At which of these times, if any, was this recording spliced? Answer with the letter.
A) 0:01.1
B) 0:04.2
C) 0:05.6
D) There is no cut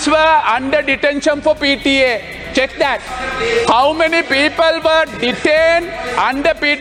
D